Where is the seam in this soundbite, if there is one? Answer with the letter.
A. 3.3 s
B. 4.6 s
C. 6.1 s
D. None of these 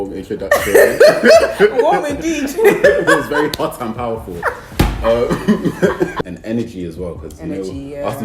C